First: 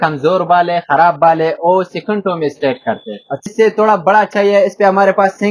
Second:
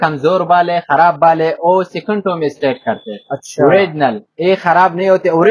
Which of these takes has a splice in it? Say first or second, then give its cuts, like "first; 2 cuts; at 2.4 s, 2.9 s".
first; 1 cut; at 3.5 s